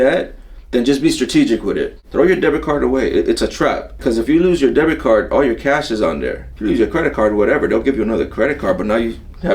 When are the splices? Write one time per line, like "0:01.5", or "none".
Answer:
0:02.0
0:04.0
0:06.5